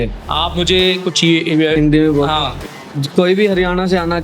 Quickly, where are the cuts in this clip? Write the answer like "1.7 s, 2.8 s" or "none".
1.8 s